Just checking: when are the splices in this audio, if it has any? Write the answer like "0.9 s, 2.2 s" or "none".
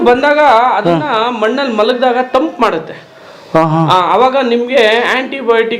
none